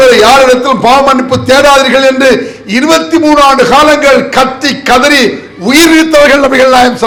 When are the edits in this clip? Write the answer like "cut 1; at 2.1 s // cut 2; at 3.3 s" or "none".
none